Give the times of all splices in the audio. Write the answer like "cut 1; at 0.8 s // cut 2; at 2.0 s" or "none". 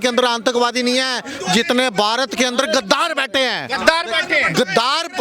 none